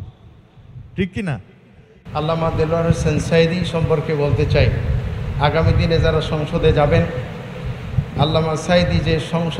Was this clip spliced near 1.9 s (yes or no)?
yes